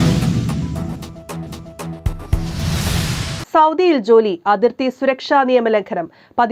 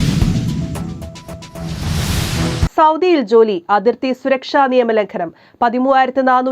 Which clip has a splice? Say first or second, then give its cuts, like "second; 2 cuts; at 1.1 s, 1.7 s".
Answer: second; 1 cut; at 1.5 s